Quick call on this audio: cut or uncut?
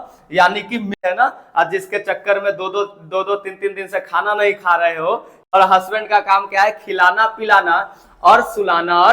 cut